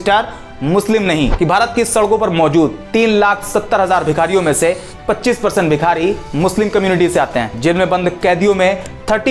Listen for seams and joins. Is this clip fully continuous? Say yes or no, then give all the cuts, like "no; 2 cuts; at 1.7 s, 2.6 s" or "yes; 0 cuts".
no; 1 cut; at 1.3 s